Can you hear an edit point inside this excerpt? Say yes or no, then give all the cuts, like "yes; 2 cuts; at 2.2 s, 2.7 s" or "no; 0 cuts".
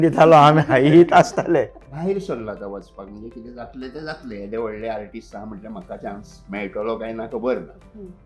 yes; 1 cut; at 1.8 s